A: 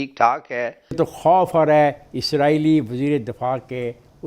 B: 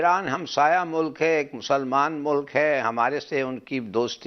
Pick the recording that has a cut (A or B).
A